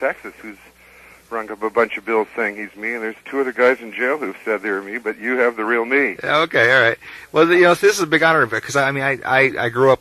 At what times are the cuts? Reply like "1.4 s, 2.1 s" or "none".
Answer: 3.9 s